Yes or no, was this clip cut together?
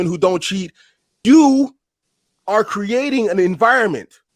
yes